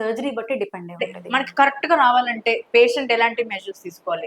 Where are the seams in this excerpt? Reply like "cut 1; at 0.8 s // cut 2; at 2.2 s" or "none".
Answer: cut 1; at 1.1 s